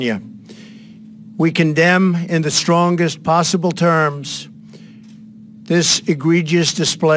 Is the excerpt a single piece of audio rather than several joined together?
yes; 0 cuts

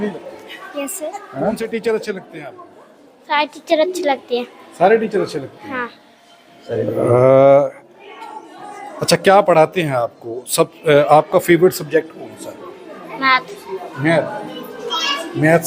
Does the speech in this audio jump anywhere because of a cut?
yes; 1 cut; at 1.6 s

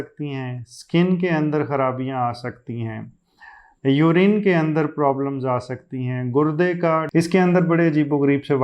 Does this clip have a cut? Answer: yes; 1 cut; at 7.1 s

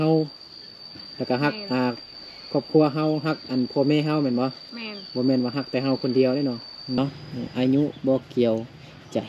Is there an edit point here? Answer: yes; 1 cut; at 7.0 s

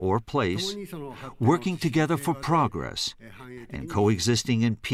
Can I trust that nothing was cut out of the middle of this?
yes; 0 cuts

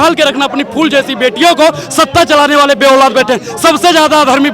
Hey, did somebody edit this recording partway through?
no; 0 cuts

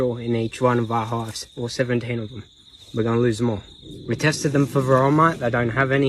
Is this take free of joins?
yes; 0 cuts

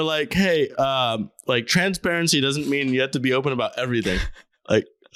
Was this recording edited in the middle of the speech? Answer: no; 0 cuts

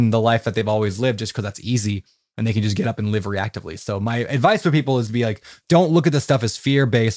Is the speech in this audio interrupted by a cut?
yes; 1 cut; at 5.5 s

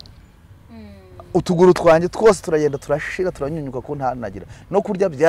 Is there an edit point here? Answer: no; 0 cuts

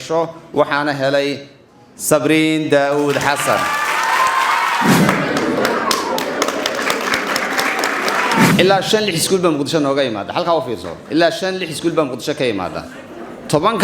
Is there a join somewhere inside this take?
yes; 2 cuts; at 5.0 s, 8.5 s

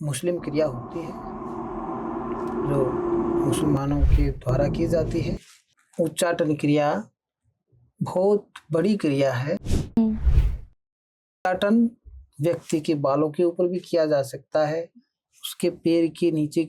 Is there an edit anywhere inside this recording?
yes; 1 cut; at 5.8 s

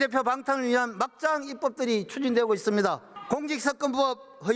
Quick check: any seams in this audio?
yes; 1 cut; at 3.1 s

